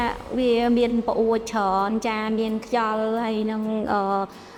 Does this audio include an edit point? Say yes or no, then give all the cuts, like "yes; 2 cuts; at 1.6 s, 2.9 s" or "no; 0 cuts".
no; 0 cuts